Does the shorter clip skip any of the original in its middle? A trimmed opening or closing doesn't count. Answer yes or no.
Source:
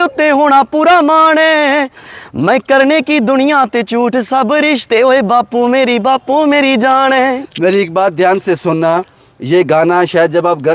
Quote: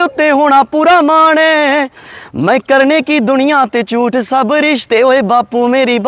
no